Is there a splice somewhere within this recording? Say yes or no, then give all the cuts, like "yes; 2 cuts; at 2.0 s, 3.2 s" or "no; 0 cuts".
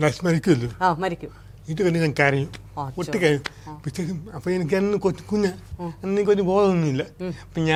no; 0 cuts